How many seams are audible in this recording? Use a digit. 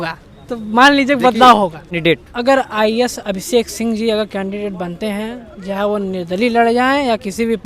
1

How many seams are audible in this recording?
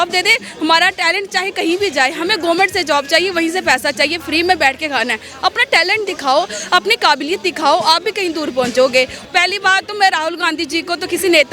1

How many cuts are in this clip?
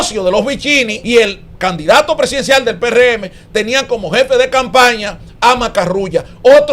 1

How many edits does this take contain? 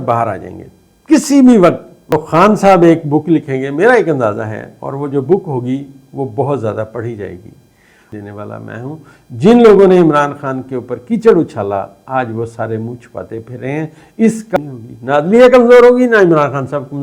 3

